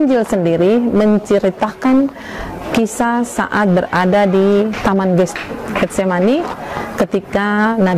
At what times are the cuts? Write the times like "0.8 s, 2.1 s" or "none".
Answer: 4.8 s